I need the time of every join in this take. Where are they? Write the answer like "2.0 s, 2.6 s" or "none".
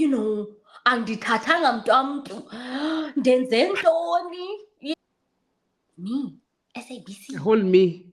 5.0 s